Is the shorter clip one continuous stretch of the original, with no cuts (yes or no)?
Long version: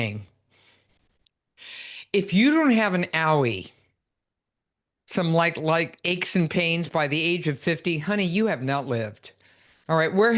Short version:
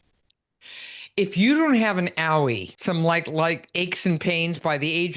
no